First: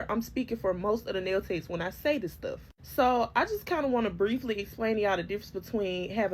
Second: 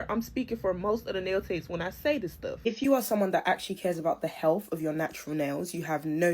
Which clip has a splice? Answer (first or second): second